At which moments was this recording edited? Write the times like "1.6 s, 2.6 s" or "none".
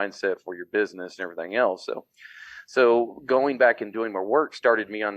none